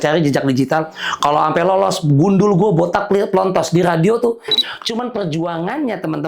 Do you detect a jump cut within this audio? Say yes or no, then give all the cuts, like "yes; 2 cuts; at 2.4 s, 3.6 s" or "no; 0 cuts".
yes; 1 cut; at 4.5 s